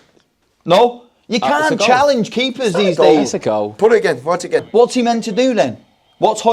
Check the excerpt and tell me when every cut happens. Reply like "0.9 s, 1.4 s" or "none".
4.7 s

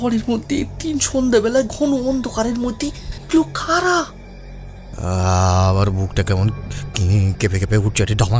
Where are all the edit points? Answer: 3.1 s

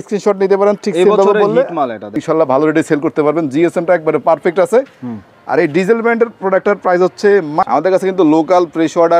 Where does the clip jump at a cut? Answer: 2.2 s, 7.7 s

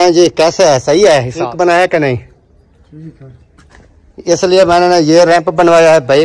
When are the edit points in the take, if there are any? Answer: 1.4 s

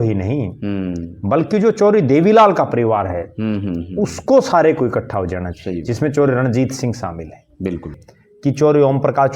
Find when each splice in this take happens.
8.0 s

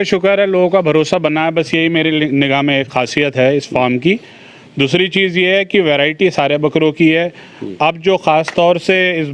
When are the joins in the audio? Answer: none

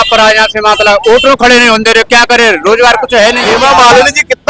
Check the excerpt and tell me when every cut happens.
3.5 s

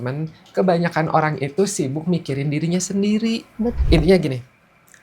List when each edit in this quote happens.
3.8 s

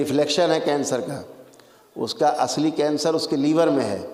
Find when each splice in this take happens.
none

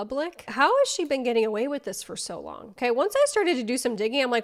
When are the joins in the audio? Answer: none

